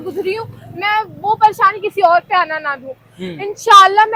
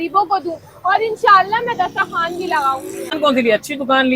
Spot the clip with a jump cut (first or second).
second